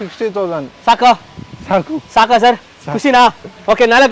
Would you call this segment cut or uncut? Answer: uncut